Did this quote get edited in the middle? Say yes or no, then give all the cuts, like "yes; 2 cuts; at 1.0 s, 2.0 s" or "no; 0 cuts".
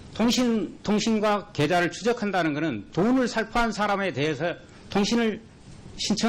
yes; 1 cut; at 2.2 s